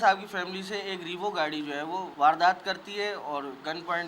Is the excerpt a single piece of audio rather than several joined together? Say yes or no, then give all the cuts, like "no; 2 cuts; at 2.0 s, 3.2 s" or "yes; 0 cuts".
no; 1 cut; at 2.1 s